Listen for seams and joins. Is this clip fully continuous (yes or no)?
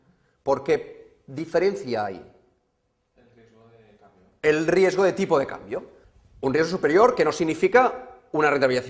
yes